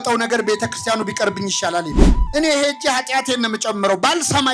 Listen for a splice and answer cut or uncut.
cut